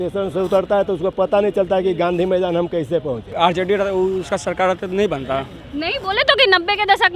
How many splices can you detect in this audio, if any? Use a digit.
1